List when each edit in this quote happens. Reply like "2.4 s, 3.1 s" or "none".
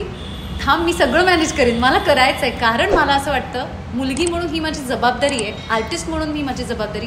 none